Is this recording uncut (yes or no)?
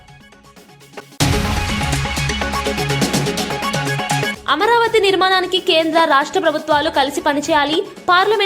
no